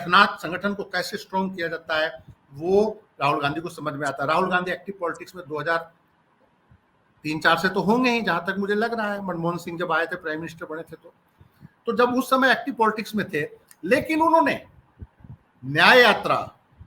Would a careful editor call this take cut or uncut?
uncut